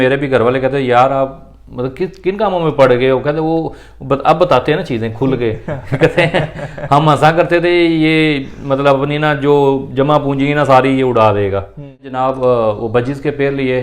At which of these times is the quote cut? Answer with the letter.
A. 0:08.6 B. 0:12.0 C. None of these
B